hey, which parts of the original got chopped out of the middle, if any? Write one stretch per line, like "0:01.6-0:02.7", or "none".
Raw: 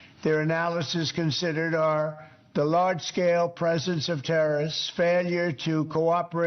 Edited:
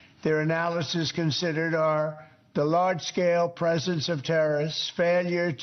none